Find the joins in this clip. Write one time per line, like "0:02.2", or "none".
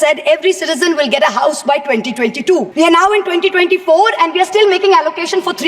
0:02.7